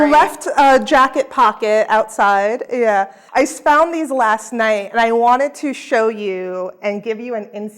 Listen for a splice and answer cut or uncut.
cut